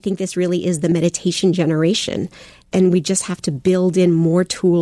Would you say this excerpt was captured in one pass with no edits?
no; 2 cuts; at 0.9 s, 2.6 s

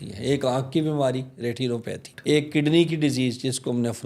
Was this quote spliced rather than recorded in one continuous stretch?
yes; 1 cut; at 2.1 s

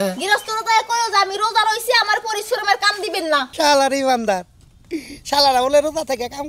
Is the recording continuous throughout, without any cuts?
no; 1 cut; at 3.5 s

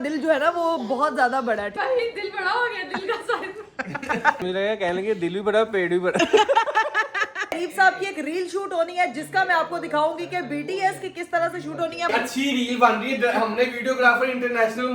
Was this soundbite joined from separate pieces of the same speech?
yes; 4 cuts; at 1.7 s, 4.4 s, 7.5 s, 12.1 s

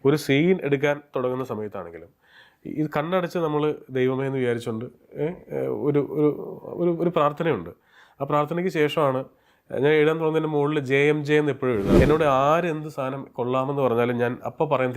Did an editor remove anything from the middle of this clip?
yes; 1 cut; at 12.0 s

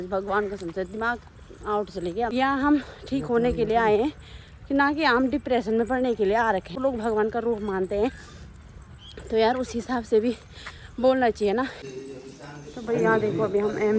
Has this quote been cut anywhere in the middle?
yes; 3 cuts; at 2.3 s, 6.7 s, 11.8 s

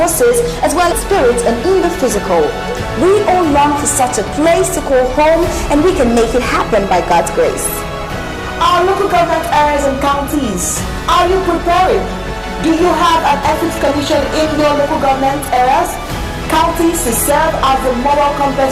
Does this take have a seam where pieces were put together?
yes; 1 cut; at 0.9 s

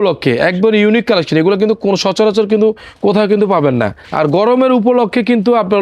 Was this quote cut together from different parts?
yes; 1 cut; at 4.0 s

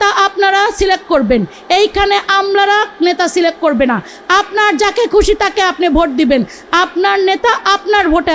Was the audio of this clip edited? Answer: no; 0 cuts

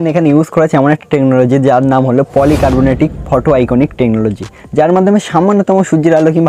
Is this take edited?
no; 0 cuts

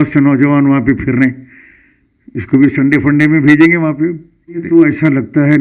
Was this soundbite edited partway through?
yes; 1 cut; at 4.6 s

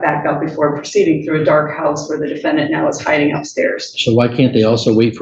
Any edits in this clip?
no; 0 cuts

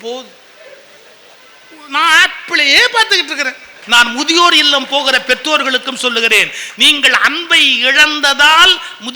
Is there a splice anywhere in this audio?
yes; 1 cut; at 3.7 s

